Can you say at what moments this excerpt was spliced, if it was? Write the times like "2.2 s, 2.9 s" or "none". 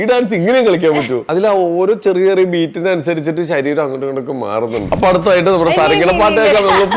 1.2 s, 4.8 s